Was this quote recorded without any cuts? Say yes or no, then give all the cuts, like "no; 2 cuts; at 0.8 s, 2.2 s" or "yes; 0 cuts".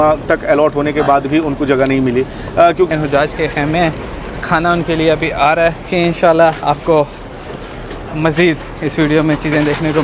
no; 2 cuts; at 2.9 s, 5.9 s